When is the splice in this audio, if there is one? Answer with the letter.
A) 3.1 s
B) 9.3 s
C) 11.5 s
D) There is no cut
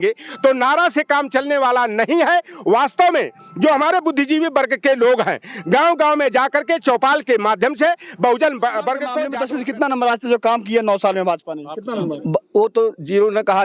B